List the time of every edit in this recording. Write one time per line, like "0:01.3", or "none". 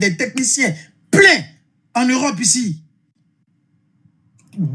none